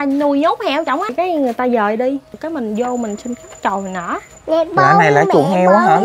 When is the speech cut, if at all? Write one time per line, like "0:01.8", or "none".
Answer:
0:01.1
0:02.4
0:04.3